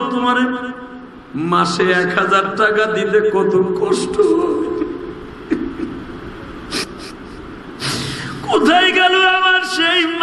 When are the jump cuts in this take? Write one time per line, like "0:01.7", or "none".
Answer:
0:06.9

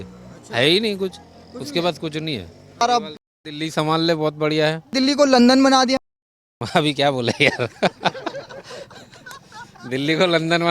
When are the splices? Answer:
0:02.8
0:04.9

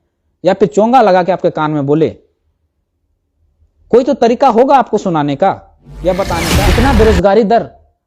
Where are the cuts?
0:06.4

